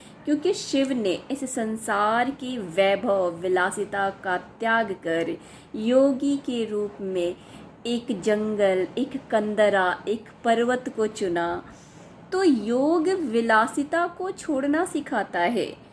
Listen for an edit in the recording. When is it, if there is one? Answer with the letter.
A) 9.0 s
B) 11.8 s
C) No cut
B